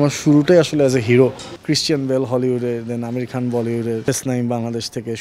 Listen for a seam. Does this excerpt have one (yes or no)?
yes